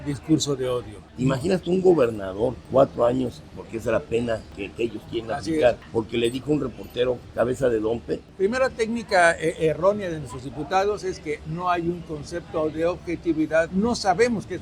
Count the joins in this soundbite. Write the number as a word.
seven